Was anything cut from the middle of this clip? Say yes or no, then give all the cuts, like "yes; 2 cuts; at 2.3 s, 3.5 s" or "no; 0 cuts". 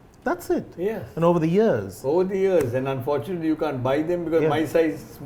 no; 0 cuts